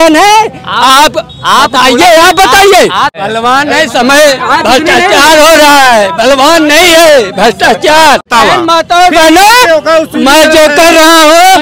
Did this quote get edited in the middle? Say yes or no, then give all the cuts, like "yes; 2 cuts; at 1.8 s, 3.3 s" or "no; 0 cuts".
yes; 2 cuts; at 3.2 s, 8.3 s